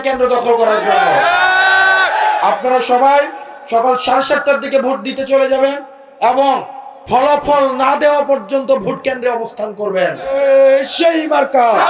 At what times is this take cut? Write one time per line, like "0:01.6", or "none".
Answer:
0:10.4